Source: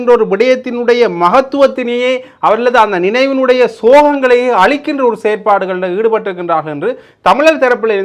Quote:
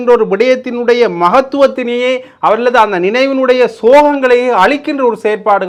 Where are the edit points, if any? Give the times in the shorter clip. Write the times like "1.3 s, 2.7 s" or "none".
none